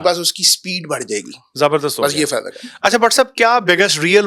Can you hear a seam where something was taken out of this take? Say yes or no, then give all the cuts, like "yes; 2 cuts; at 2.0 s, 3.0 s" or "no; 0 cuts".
no; 0 cuts